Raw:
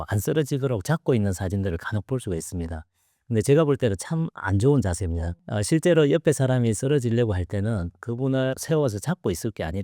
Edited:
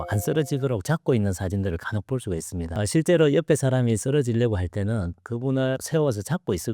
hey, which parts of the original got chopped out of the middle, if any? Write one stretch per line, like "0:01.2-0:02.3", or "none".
0:02.7-0:05.4